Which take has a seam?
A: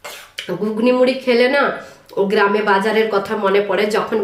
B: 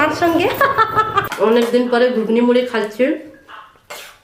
B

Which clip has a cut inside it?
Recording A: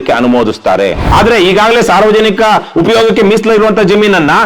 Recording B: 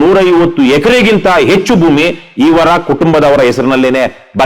A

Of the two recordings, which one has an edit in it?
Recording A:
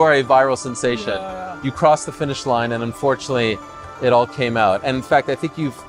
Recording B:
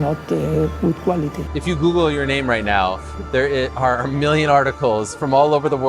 B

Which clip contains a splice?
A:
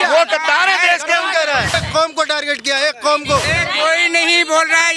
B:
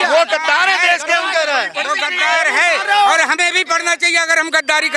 A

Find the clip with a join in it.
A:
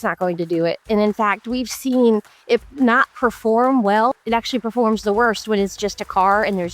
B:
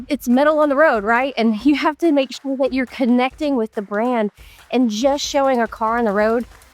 A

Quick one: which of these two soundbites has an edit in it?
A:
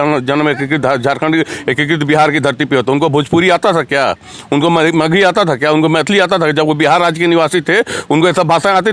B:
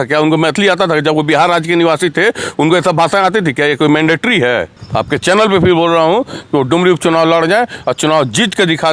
B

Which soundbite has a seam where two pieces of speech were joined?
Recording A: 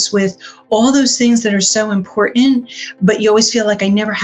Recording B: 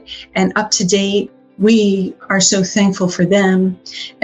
B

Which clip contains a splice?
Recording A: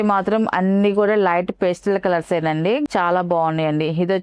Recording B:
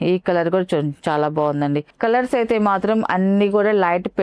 A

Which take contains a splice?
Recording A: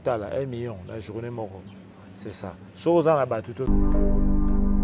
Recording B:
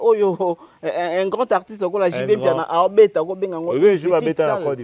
A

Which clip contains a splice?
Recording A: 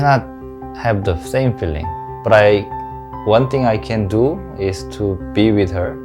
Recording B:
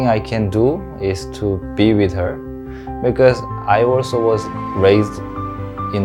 A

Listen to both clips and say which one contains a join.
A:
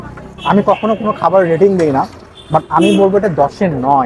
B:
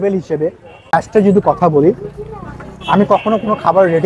B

